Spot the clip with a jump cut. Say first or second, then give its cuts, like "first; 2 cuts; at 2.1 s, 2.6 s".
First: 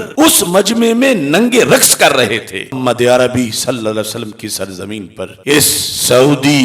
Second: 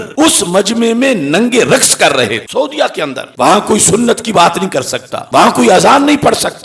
second; 1 cut; at 2.4 s